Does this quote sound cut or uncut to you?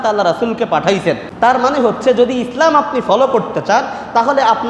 cut